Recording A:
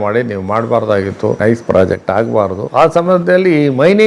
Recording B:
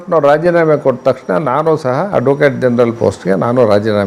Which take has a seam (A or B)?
A